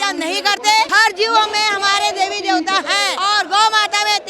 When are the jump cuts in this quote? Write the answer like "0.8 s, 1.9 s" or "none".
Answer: 0.9 s, 3.1 s